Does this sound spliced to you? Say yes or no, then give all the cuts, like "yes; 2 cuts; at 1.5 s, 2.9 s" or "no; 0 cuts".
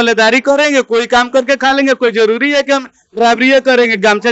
no; 0 cuts